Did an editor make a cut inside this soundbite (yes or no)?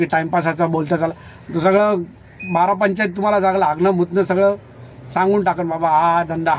no